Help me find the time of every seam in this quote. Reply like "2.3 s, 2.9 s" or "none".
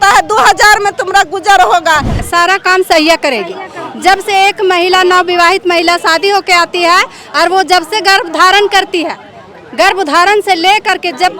2.2 s

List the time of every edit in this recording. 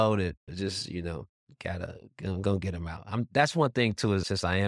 none

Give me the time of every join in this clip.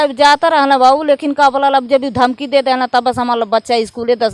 none

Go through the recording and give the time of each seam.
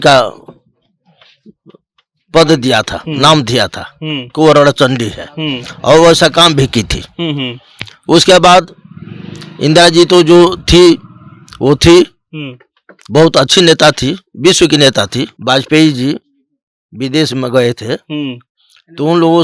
15.3 s

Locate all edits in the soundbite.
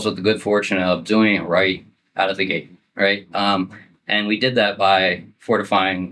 none

